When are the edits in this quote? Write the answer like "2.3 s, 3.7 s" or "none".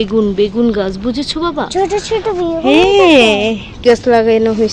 3.8 s